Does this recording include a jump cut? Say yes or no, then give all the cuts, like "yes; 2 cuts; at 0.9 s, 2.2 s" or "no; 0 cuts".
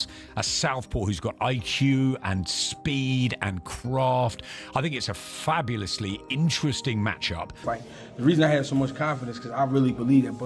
yes; 1 cut; at 7.6 s